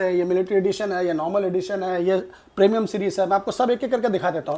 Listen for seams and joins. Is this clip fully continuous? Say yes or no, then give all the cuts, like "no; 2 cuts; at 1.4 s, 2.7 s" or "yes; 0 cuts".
yes; 0 cuts